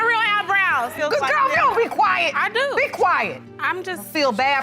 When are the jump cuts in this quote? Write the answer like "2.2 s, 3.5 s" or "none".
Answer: 0.9 s